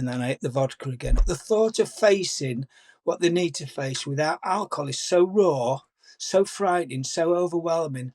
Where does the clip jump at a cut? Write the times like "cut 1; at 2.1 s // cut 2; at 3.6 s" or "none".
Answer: cut 1; at 1.2 s